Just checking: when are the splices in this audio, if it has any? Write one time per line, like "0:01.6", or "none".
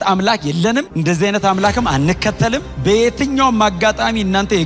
0:00.9
0:02.7